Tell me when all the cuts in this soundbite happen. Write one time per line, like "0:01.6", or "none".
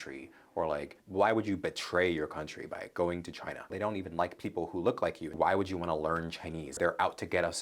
0:01.0
0:03.7
0:05.3
0:06.7